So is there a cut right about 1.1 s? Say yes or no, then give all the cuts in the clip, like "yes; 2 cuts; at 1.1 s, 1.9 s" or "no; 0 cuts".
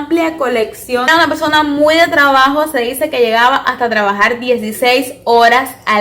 yes; 1 cut; at 1.1 s